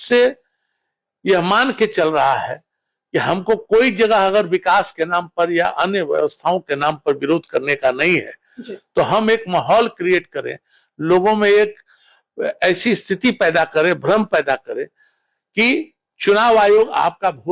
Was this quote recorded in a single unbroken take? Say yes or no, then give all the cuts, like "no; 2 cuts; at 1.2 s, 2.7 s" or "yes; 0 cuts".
yes; 0 cuts